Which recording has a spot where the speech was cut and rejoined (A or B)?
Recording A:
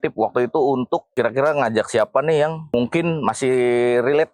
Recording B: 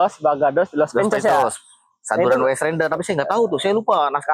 A